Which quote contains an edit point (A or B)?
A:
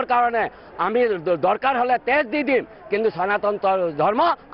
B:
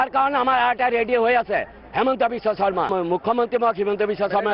B